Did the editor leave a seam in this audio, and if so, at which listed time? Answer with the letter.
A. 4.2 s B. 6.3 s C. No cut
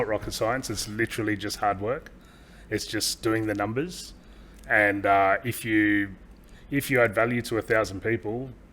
C